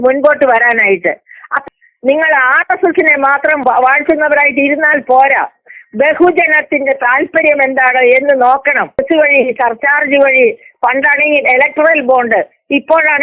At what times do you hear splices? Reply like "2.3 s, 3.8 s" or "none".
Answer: 1.6 s, 9.0 s